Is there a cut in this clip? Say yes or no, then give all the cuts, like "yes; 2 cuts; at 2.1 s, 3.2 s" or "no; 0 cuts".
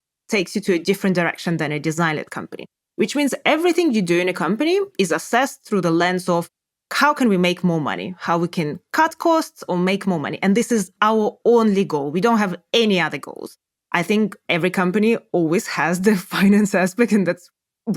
no; 0 cuts